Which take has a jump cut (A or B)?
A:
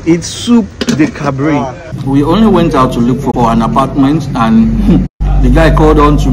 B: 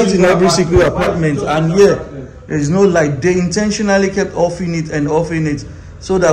A